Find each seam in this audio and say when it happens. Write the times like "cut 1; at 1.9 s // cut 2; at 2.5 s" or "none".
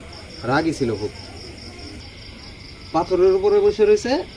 cut 1; at 2.0 s